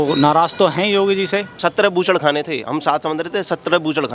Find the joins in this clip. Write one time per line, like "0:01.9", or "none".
0:01.5